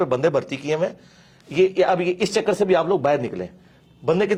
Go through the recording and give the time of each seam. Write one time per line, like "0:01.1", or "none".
none